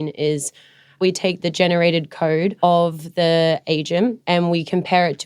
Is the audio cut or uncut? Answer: cut